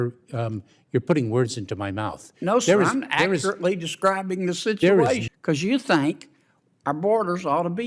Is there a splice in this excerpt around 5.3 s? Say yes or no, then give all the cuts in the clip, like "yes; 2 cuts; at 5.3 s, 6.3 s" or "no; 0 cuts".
yes; 1 cut; at 5.3 s